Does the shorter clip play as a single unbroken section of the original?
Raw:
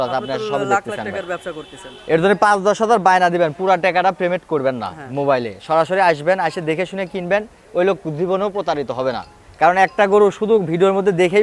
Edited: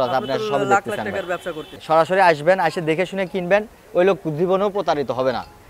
no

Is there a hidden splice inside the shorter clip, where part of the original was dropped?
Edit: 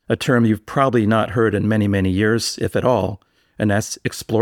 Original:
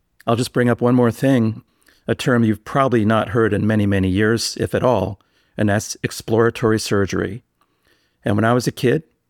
no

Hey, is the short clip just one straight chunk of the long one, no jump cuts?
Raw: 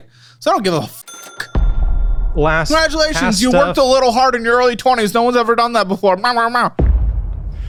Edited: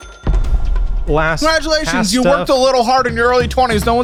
yes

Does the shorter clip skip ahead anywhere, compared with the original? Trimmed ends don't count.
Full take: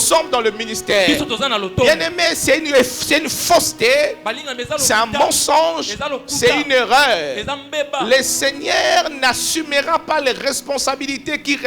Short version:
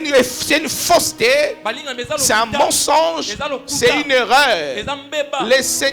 no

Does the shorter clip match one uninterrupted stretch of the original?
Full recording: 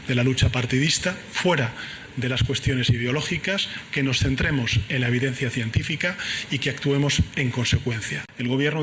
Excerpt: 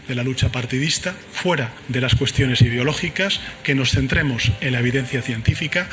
no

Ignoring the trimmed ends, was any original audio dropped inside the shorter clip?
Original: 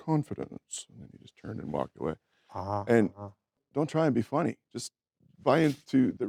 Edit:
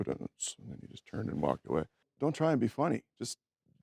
yes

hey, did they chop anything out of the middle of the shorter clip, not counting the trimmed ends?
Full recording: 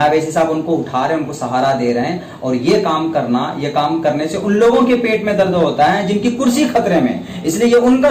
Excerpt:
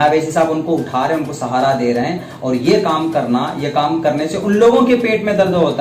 no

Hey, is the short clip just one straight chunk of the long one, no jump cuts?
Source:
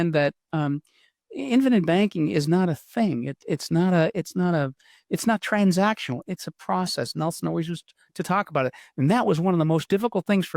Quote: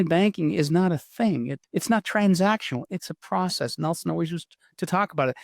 no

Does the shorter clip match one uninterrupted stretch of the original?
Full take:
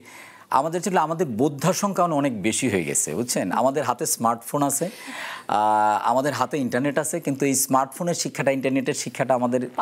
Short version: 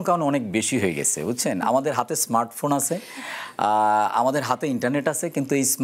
yes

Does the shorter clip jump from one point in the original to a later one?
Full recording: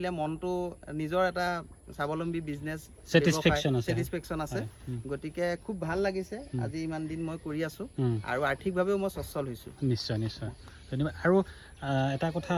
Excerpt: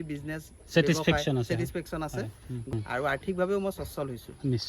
yes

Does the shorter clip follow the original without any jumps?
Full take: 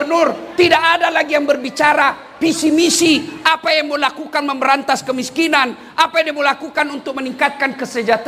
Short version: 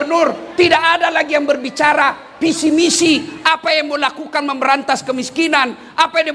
yes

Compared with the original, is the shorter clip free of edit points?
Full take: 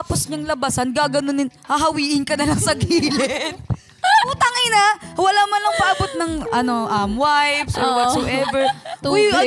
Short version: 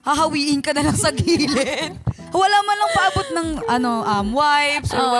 no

